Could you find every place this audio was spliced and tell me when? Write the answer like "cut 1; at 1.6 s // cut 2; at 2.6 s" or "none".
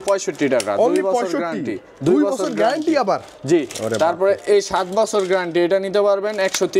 none

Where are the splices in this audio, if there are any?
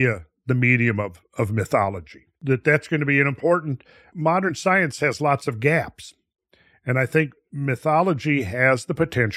cut 1; at 2.3 s // cut 2; at 4.1 s

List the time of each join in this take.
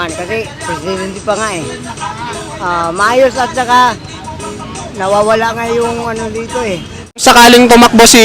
cut 1; at 7.2 s

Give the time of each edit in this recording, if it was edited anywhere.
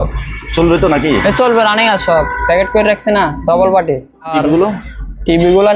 cut 1; at 4.3 s

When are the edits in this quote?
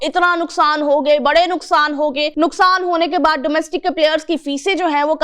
cut 1; at 2.3 s

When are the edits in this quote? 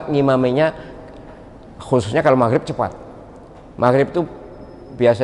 none

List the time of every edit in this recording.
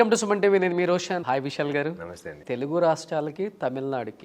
cut 1; at 1.2 s

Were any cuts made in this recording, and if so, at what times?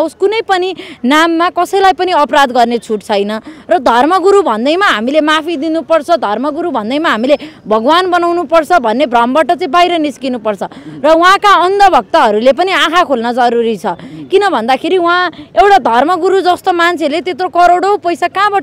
none

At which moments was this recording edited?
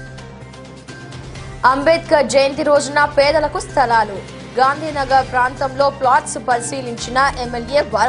cut 1; at 1.1 s

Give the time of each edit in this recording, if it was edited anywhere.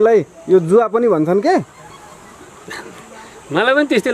none

